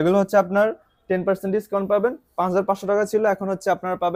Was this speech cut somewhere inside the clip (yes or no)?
no